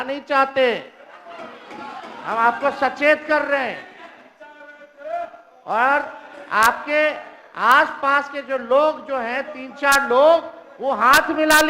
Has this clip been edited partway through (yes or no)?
no